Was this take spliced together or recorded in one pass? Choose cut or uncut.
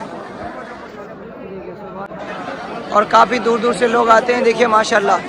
cut